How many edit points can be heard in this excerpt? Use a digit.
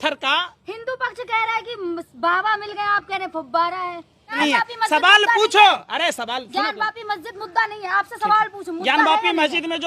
1